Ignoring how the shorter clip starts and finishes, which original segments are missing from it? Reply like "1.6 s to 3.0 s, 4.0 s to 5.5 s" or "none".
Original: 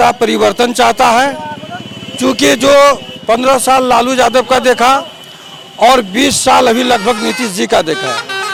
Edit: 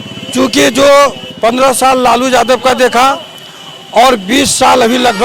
none